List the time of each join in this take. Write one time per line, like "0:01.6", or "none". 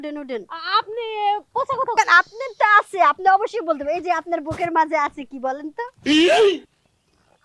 0:01.9